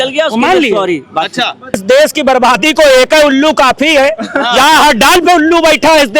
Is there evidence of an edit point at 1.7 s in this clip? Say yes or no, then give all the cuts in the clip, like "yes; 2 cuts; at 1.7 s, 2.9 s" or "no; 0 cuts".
yes; 1 cut; at 1.7 s